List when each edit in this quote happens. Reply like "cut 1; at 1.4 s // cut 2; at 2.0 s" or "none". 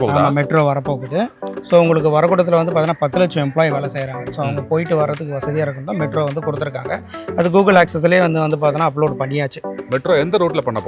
none